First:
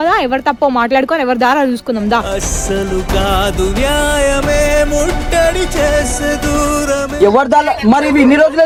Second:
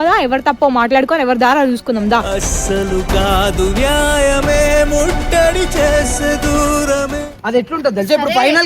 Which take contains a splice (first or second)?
second